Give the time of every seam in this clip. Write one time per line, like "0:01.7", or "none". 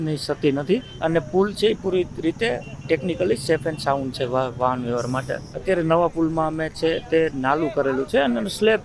0:00.9
0:05.4